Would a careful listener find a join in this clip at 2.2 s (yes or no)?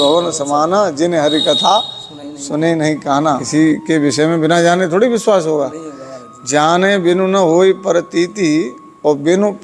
no